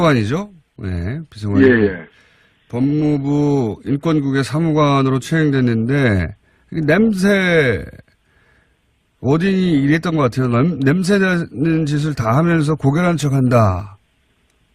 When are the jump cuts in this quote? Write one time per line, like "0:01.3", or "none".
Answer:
0:11.1